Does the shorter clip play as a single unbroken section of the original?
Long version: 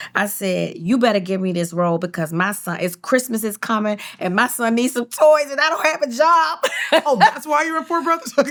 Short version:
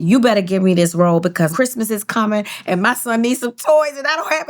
no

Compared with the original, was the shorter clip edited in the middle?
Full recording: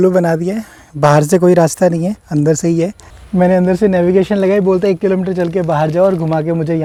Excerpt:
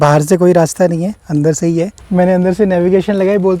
yes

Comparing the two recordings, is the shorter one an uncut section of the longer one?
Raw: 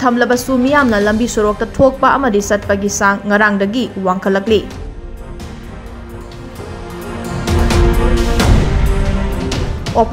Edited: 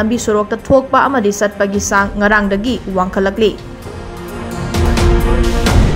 no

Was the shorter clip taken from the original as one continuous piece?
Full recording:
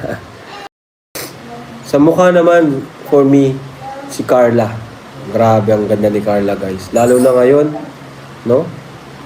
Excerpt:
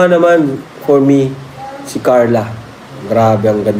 yes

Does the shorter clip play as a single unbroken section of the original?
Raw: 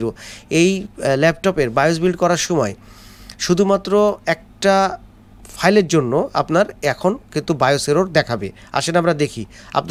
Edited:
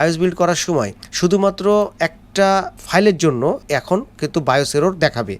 no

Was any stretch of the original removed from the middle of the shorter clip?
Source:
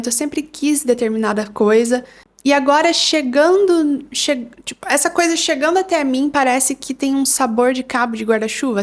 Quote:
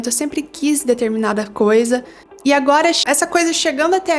yes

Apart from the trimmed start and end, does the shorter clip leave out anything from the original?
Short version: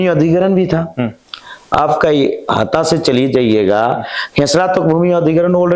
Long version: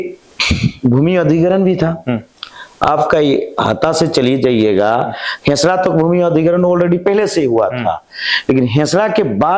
no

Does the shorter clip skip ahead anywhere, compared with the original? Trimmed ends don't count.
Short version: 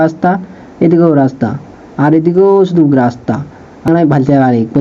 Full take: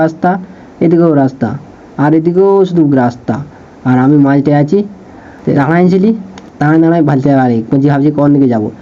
yes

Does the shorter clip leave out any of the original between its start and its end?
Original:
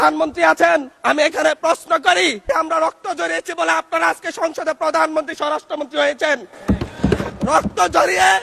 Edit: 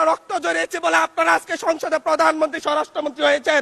no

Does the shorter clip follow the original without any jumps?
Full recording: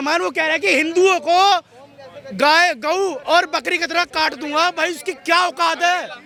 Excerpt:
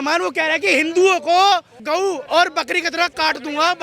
no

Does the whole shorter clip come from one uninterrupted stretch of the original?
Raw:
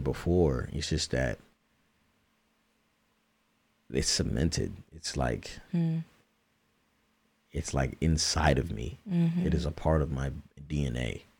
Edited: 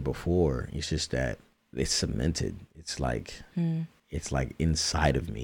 no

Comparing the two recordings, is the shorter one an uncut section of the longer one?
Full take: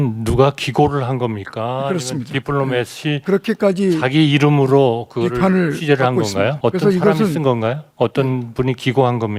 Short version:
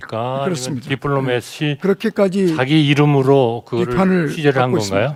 yes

